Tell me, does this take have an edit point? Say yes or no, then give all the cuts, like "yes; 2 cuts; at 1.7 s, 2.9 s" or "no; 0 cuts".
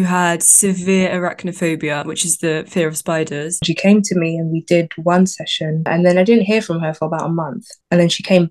yes; 2 cuts; at 3.7 s, 5.9 s